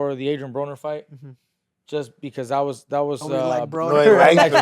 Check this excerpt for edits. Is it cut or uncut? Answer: cut